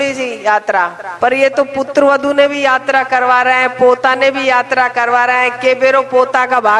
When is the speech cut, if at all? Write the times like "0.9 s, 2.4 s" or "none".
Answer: 1.0 s